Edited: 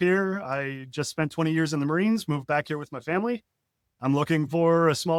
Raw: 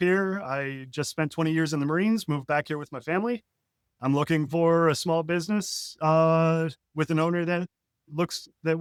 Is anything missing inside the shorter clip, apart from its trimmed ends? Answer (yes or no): no